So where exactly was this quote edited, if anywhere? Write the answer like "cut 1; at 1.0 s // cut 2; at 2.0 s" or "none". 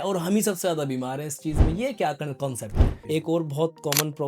cut 1; at 2.9 s